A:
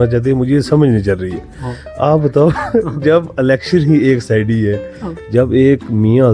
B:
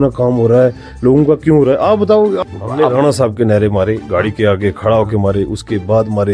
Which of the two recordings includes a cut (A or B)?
B